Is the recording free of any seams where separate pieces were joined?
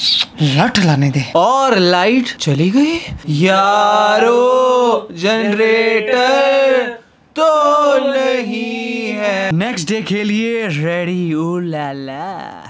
yes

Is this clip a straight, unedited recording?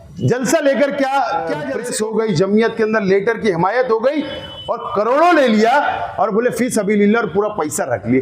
no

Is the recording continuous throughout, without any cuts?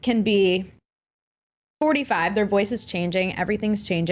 yes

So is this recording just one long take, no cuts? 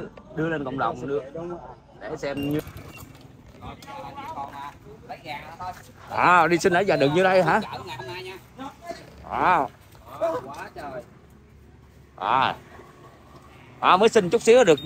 no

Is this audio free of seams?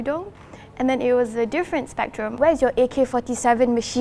no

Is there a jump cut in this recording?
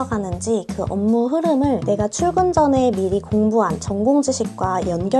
no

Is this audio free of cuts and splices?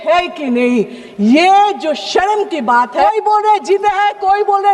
no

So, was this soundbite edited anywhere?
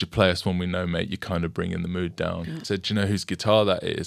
yes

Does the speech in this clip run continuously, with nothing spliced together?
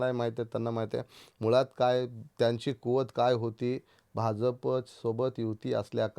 no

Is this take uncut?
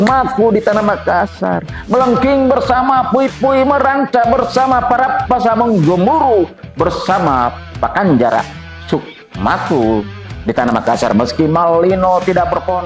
yes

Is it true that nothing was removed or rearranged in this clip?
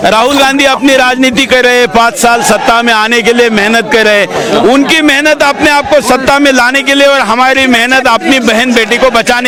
yes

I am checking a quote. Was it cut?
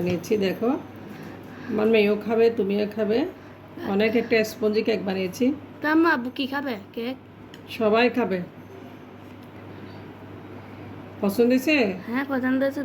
no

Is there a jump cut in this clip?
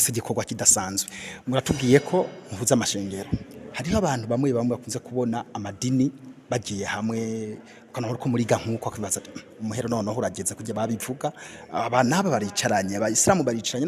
no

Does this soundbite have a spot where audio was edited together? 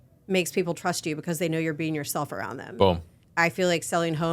yes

